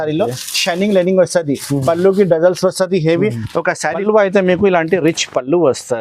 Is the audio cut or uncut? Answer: cut